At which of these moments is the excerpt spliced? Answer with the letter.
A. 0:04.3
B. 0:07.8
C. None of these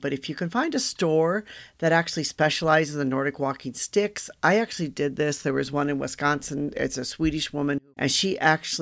B